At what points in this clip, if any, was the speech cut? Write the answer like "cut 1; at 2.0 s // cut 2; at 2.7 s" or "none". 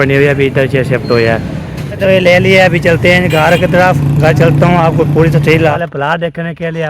cut 1; at 1.9 s // cut 2; at 5.8 s